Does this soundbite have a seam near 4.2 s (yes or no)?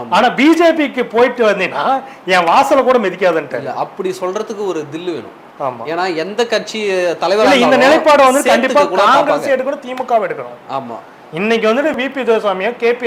no